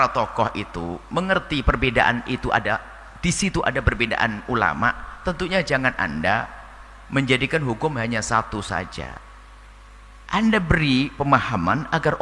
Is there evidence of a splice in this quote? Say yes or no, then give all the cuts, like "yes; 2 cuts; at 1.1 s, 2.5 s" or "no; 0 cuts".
no; 0 cuts